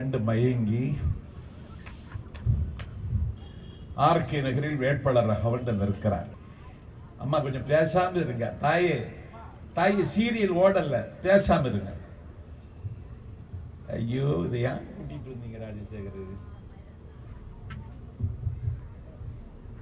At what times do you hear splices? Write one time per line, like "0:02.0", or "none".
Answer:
0:06.3